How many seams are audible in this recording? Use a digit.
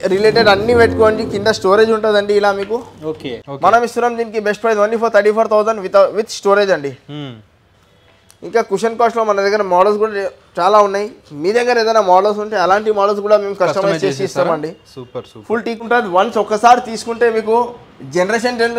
2